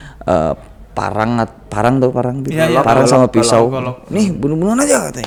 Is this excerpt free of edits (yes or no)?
yes